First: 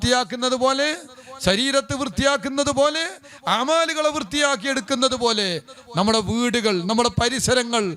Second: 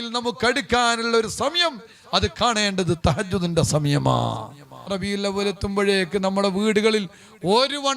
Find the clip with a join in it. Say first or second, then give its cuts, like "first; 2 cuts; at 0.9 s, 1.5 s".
second; 1 cut; at 4.9 s